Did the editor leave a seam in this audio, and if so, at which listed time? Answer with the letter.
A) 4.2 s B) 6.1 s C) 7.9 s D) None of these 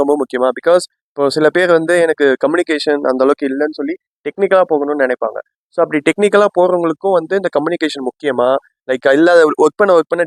D